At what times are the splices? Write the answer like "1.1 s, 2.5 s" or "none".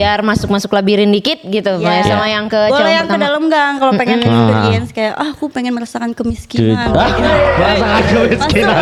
none